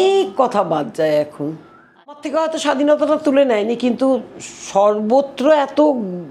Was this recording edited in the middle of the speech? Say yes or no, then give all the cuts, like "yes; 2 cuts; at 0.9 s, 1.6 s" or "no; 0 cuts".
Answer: yes; 1 cut; at 2.2 s